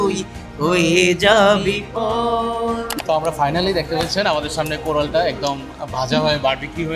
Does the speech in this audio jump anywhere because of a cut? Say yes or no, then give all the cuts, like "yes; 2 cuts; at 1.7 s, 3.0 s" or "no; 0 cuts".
yes; 1 cut; at 2.9 s